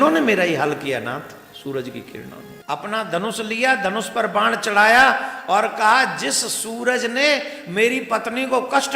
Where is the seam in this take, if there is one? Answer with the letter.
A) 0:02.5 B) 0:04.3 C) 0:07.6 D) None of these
A